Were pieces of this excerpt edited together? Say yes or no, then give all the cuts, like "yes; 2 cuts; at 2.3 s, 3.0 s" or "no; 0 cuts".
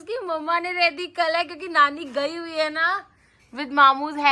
no; 0 cuts